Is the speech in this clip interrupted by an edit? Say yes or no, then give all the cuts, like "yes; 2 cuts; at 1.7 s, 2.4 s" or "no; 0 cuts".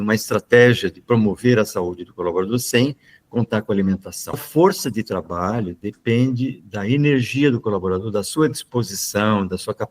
yes; 1 cut; at 4.4 s